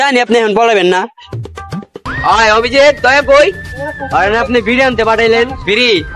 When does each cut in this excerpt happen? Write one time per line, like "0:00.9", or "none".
0:02.1